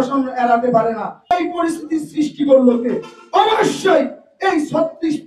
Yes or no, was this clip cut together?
yes